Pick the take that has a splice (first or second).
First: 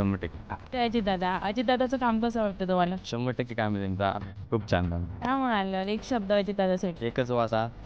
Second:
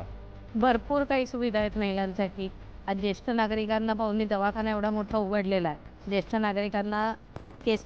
first